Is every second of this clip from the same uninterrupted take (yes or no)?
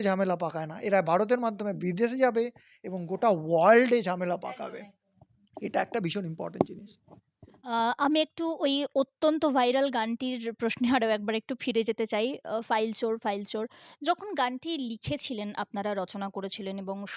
yes